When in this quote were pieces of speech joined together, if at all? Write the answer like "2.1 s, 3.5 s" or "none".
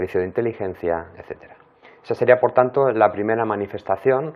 2.2 s

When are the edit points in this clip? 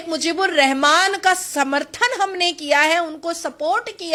none

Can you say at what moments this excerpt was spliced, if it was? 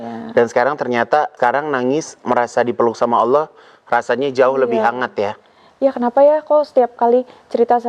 1.3 s

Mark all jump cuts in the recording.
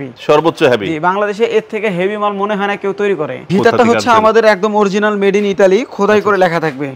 3.5 s

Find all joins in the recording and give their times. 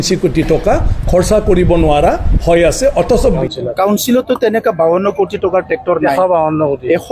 3.4 s

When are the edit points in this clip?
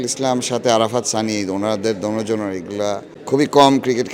3.1 s

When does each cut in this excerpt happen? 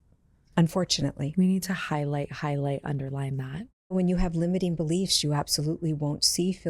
3.9 s

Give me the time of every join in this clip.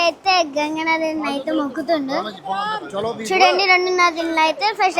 none

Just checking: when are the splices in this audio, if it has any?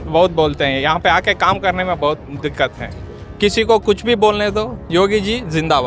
3.2 s

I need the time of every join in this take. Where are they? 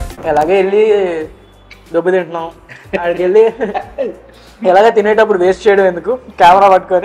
none

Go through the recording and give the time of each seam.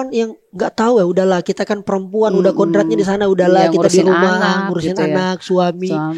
none

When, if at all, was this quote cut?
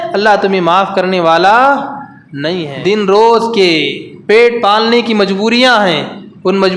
2.7 s

